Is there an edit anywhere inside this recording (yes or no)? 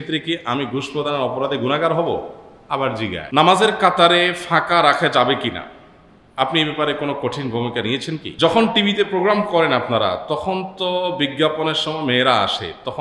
yes